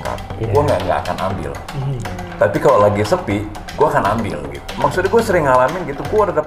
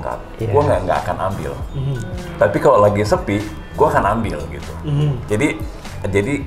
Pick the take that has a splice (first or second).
first